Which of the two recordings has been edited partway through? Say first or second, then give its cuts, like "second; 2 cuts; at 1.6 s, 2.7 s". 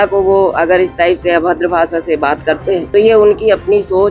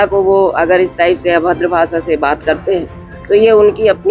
first; 1 cut; at 2.9 s